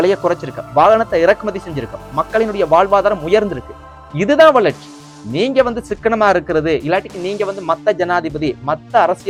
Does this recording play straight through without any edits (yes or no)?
yes